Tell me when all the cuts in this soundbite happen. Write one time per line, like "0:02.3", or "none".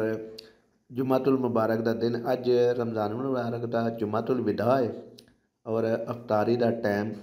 none